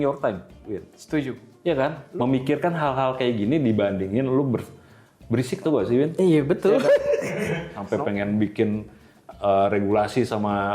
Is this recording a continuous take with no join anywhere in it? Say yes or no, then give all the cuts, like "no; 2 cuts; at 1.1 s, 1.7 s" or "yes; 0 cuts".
no; 2 cuts; at 2.0 s, 7.7 s